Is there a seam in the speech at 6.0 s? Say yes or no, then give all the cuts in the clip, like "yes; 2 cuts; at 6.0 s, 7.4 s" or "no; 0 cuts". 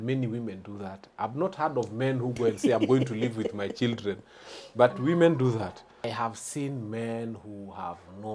yes; 1 cut; at 6.0 s